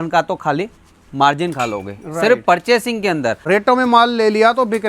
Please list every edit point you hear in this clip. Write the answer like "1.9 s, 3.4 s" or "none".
3.4 s